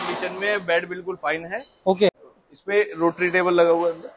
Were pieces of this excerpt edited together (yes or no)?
yes